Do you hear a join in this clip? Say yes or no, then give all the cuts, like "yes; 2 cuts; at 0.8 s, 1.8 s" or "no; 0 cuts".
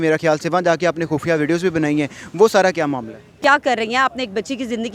yes; 1 cut; at 3.4 s